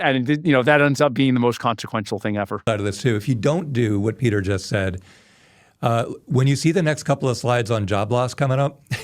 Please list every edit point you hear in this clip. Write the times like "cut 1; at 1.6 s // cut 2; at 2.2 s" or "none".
cut 1; at 2.6 s

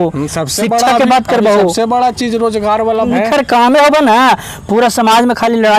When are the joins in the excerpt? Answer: cut 1; at 3.1 s

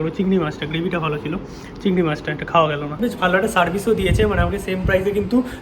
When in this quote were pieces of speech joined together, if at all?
cut 1; at 3.0 s

